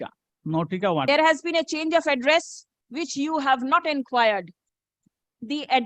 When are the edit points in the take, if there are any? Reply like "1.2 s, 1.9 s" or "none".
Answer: 1.1 s